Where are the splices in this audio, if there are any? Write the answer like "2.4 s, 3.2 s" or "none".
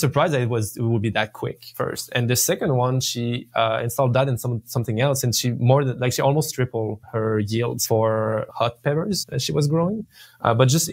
7.0 s, 7.8 s, 8.5 s, 9.3 s